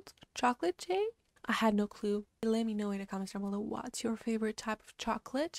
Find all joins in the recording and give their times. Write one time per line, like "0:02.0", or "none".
none